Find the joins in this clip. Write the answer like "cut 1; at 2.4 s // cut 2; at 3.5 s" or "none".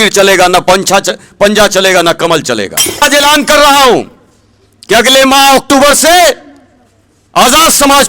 cut 1; at 3.0 s